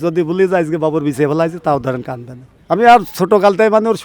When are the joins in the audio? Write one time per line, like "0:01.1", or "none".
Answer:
none